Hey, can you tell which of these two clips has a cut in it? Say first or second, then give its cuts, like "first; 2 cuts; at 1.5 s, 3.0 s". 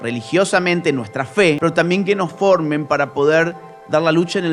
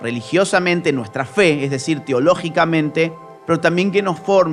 first; 1 cut; at 1.6 s